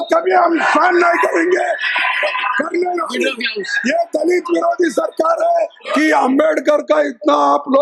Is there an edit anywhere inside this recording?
yes; 1 cut; at 5.8 s

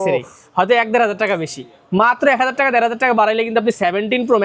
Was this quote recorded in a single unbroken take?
yes; 0 cuts

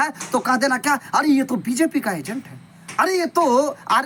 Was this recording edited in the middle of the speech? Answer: no; 0 cuts

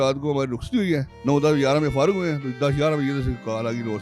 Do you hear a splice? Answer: yes; 1 cut; at 1.1 s

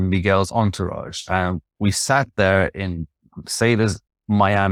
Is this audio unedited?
yes; 0 cuts

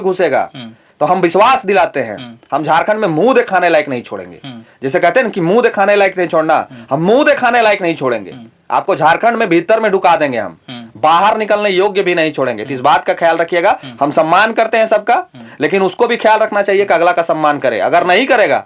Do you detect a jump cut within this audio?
no; 0 cuts

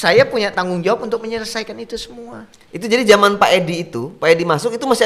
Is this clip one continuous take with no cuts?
yes; 0 cuts

